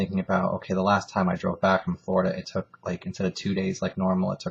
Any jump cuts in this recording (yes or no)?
yes